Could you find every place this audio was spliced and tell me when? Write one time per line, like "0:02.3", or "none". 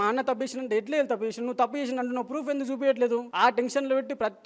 0:03.3